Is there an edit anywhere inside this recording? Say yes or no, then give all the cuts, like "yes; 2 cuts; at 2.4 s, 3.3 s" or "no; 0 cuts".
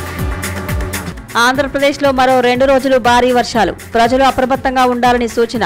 yes; 1 cut; at 1.1 s